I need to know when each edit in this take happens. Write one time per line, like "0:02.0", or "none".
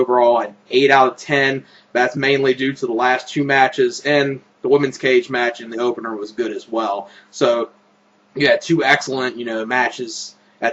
0:08.4